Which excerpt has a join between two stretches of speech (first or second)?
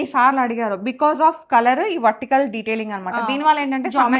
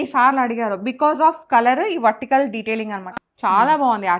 second